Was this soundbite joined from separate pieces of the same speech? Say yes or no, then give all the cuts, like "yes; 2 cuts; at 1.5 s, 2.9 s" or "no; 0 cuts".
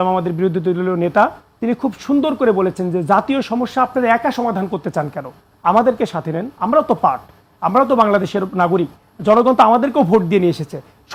no; 0 cuts